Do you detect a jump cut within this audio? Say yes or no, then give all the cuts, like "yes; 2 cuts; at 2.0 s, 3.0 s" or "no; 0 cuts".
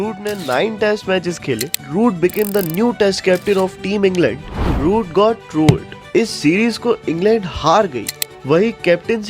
yes; 3 cuts; at 1.8 s, 4.6 s, 8.1 s